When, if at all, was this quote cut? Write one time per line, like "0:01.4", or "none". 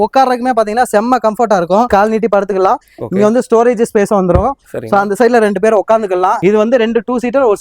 0:01.9
0:06.4